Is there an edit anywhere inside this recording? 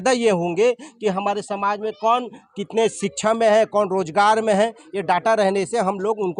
no; 0 cuts

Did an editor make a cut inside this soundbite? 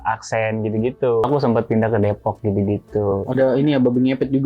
yes; 1 cut; at 1.3 s

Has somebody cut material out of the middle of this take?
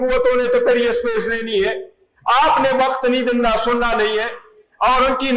no; 0 cuts

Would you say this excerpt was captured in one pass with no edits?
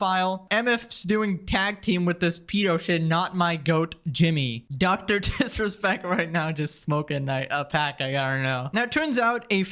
no; 1 cut; at 0.9 s

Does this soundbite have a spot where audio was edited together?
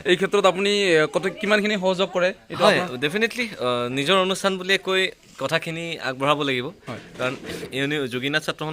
no; 0 cuts

